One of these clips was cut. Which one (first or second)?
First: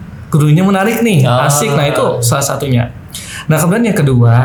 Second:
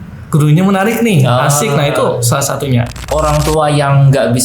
second